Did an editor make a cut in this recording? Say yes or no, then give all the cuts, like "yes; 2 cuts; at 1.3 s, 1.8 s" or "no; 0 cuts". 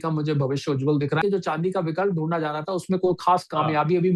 yes; 1 cut; at 1.2 s